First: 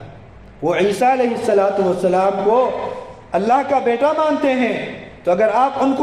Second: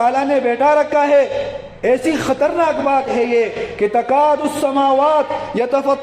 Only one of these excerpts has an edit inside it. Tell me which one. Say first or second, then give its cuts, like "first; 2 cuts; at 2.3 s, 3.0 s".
second; 1 cut; at 1.6 s